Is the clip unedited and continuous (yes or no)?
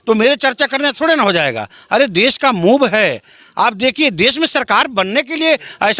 yes